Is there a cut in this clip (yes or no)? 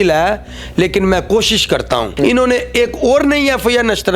yes